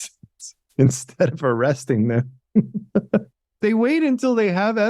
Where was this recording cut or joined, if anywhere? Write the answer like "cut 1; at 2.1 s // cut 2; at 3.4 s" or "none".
cut 1; at 3.5 s